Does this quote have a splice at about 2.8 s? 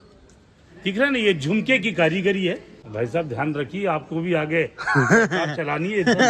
yes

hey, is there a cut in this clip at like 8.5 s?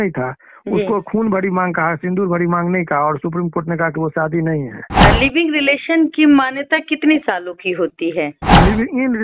yes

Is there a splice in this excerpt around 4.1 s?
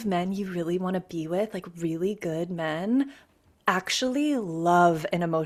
no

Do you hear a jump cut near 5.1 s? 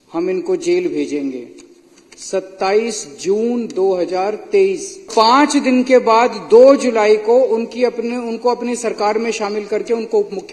yes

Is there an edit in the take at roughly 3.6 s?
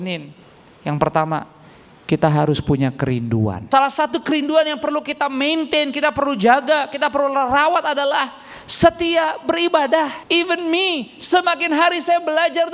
yes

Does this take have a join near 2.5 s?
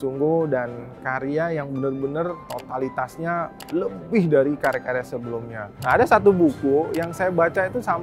yes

